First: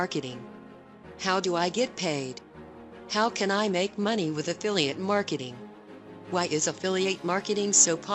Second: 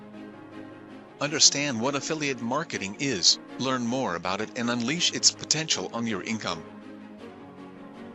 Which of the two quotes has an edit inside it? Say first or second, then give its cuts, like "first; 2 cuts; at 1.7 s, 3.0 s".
second; 2 cuts; at 1.1 s, 6.6 s